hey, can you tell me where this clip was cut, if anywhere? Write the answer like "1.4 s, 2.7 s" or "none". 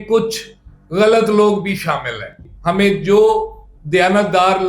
2.4 s